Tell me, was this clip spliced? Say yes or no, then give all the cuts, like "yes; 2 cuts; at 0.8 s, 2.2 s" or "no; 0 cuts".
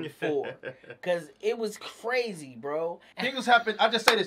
yes; 1 cut; at 3.1 s